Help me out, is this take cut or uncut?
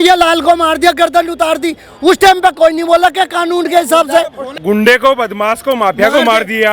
cut